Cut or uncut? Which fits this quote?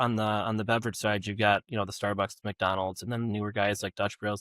uncut